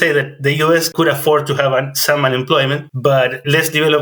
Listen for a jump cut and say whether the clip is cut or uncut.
cut